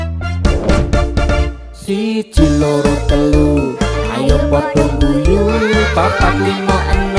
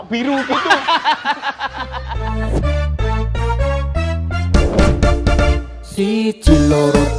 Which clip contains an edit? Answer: second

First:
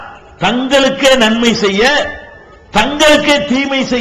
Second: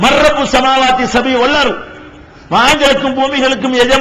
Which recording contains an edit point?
second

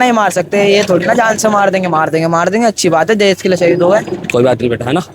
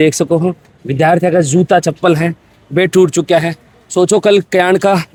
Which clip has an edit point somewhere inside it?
first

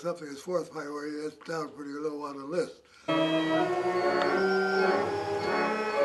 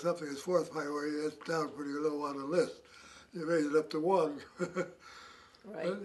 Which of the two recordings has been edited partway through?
second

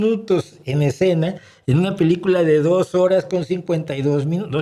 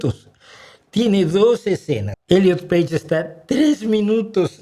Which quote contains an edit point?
second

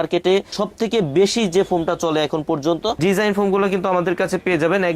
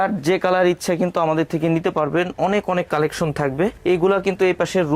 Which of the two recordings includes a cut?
first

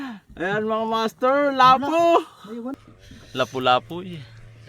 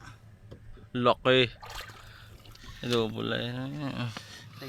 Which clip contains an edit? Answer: first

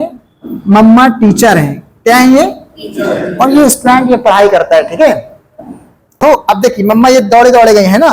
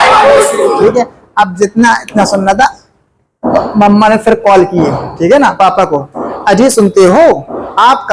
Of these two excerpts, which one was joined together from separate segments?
first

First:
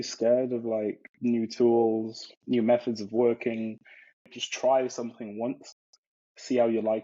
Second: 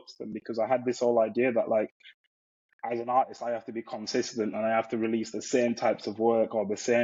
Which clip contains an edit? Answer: first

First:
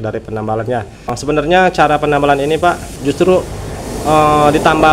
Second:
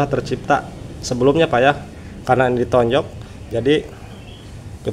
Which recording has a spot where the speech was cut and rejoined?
first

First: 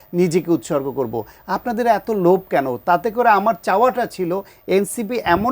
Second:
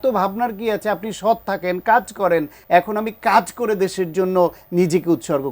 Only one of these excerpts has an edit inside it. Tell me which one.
second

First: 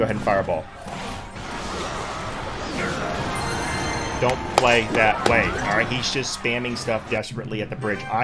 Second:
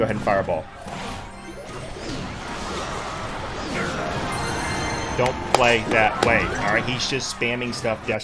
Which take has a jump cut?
first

